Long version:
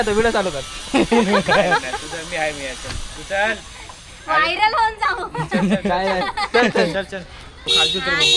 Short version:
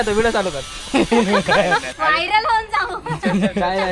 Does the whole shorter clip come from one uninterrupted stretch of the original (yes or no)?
no